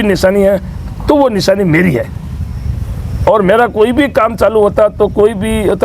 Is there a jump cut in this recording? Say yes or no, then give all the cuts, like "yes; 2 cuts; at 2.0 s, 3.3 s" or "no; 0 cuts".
no; 0 cuts